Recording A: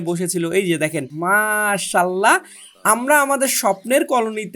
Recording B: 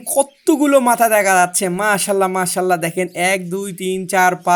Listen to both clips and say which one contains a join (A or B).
A